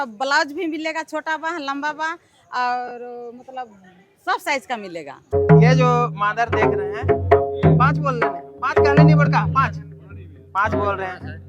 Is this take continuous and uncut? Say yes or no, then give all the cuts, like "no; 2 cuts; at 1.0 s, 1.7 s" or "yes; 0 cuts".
no; 1 cut; at 5.3 s